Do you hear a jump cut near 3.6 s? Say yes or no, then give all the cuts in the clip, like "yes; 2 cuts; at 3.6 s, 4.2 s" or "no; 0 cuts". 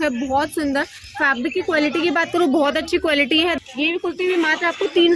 yes; 1 cut; at 3.6 s